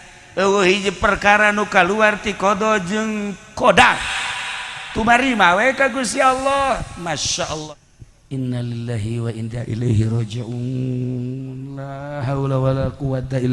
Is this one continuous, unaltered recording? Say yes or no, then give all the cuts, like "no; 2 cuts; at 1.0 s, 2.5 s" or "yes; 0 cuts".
no; 1 cut; at 7.6 s